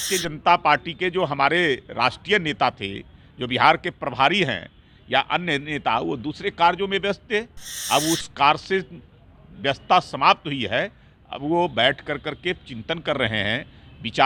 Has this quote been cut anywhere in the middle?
no; 0 cuts

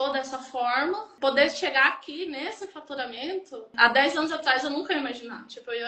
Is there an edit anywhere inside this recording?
yes; 2 cuts; at 1.1 s, 3.7 s

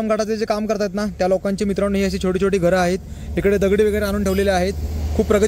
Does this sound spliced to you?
no; 0 cuts

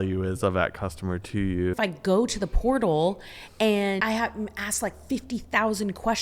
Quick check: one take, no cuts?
no; 2 cuts; at 1.8 s, 4.0 s

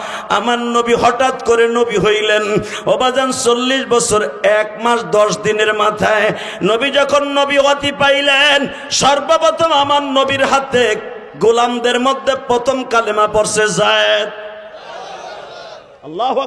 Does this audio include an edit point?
no; 0 cuts

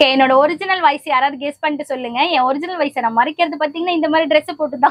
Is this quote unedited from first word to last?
yes; 0 cuts

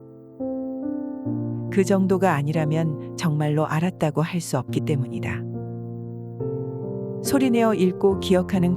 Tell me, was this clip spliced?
yes; 1 cut; at 1.1 s

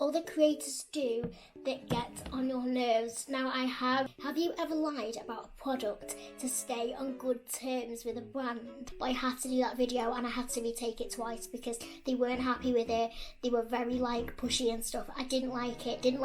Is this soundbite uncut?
no; 2 cuts; at 4.1 s, 8.9 s

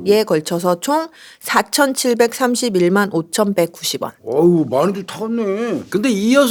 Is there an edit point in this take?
no; 0 cuts

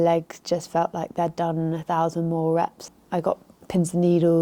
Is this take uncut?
no; 1 cut; at 2.8 s

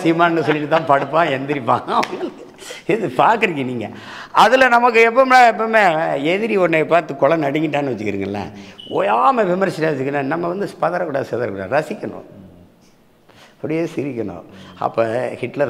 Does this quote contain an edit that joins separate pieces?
no; 0 cuts

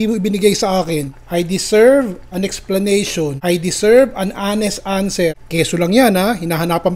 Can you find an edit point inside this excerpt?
yes; 3 cuts; at 1.2 s, 3.4 s, 5.4 s

